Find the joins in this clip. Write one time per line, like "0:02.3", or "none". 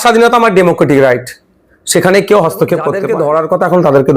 0:03.0